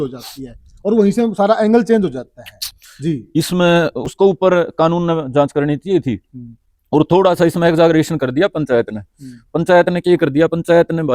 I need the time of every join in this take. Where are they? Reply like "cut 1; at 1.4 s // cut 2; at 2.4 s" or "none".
cut 1; at 4.0 s